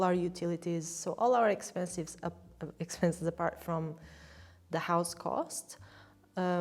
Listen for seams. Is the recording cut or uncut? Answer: uncut